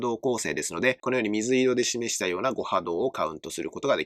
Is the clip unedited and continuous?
no; 1 cut; at 1.0 s

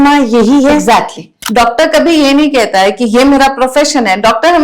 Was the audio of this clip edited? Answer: yes; 1 cut; at 1.3 s

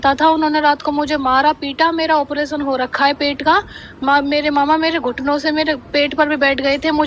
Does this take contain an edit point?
no; 0 cuts

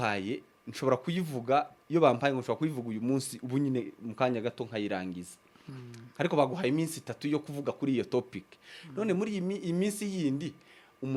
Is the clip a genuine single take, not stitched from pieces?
yes; 0 cuts

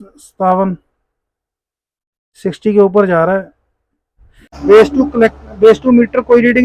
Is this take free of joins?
no; 1 cut; at 4.5 s

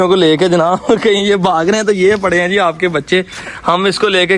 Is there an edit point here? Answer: no; 0 cuts

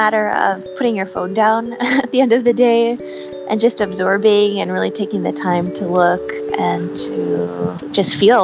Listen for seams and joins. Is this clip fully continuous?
yes; 0 cuts

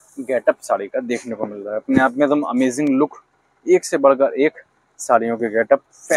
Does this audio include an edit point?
no; 0 cuts

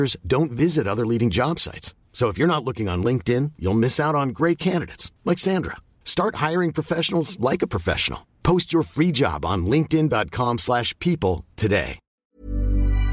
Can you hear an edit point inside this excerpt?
yes; 1 cut; at 12.1 s

